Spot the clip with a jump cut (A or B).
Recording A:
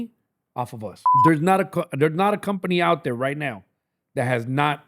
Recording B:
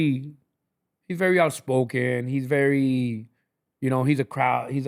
A